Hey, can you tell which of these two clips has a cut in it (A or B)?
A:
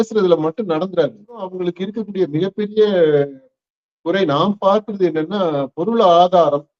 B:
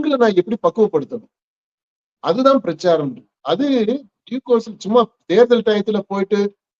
A